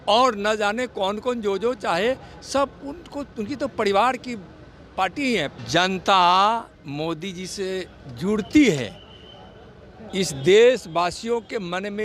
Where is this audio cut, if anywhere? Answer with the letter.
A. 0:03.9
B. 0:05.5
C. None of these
B